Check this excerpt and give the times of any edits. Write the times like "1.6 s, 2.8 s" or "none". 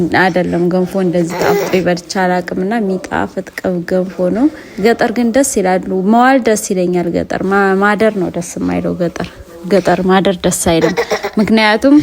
4.7 s